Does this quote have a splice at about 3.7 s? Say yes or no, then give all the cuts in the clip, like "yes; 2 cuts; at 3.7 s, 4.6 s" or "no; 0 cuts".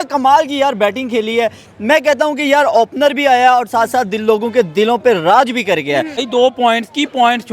no; 1 cut; at 6.2 s